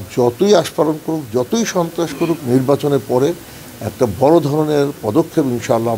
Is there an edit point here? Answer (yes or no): no